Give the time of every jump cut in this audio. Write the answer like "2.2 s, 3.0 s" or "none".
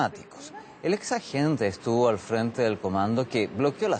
1.1 s